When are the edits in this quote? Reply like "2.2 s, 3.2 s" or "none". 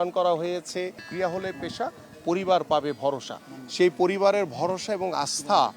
1.0 s